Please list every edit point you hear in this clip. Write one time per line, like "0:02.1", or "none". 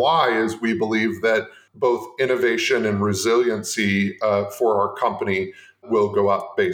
0:01.6
0:05.8